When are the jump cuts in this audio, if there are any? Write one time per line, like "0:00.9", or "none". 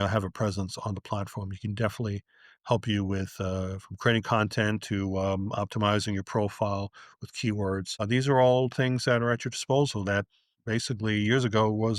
0:07.9